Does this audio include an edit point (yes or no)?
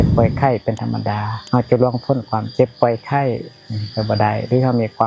yes